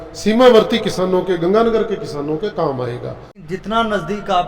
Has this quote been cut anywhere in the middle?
yes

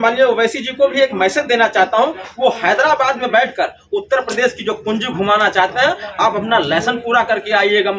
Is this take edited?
no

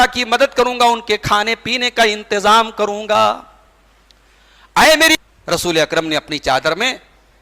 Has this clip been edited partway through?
yes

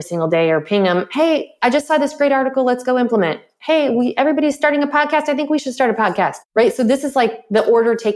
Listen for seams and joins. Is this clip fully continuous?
yes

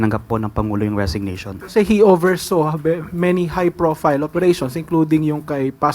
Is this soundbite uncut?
no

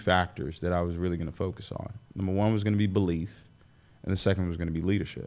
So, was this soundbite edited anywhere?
no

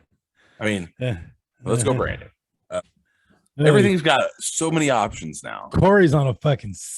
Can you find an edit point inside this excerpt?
yes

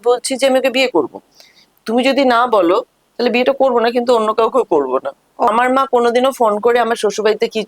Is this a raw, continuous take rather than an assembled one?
no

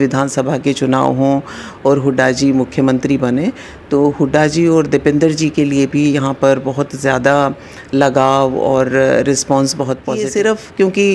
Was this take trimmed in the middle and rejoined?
yes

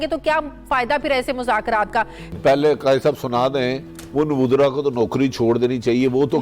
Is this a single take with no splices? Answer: no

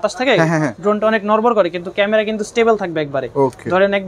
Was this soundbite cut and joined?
no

